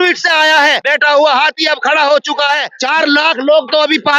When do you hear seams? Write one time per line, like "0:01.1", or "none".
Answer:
0:00.8
0:02.7